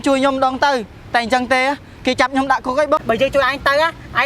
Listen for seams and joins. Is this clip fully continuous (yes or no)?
no